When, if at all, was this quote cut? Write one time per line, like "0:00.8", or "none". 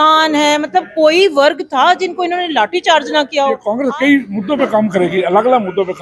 0:03.8